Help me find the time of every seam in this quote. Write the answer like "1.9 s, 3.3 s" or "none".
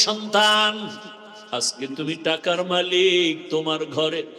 1.3 s

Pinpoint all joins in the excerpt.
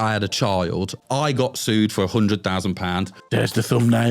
1.0 s, 3.2 s

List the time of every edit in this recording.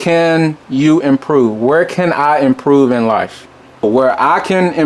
3.8 s

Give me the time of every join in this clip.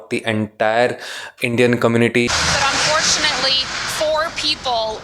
2.3 s

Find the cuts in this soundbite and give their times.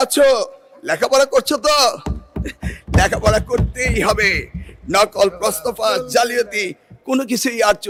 none

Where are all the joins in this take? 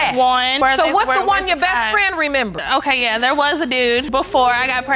none

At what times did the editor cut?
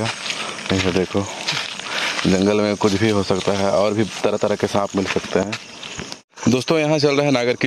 6.2 s

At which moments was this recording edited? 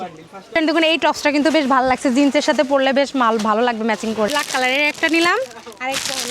4.3 s

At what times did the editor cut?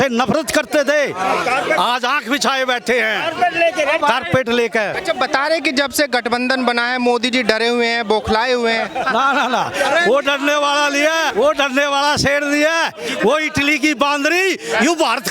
4.9 s, 11.3 s

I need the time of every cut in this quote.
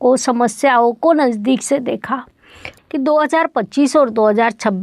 2.7 s

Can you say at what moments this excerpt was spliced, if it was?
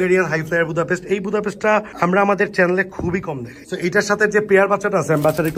3.5 s

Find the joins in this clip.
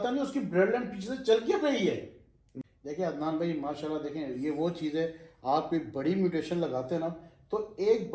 2.7 s

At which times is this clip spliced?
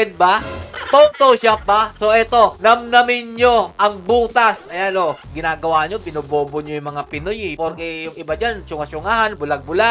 5.3 s, 7.5 s

